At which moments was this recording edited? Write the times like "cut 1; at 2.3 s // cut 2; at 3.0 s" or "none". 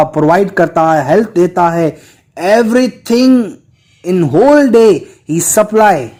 none